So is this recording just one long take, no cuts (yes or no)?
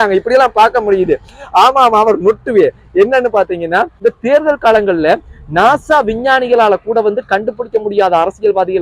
no